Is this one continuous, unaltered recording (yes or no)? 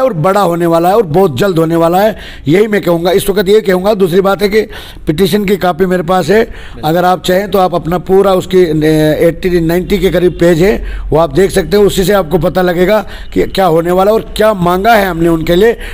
yes